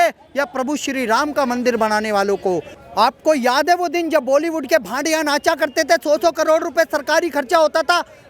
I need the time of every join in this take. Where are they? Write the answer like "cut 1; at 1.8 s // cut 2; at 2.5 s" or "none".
cut 1; at 2.7 s